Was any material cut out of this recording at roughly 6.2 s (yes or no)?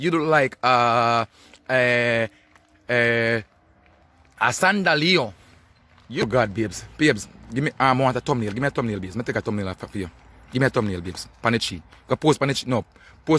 yes